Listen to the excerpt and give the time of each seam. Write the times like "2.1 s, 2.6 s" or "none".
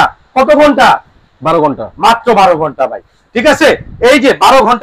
none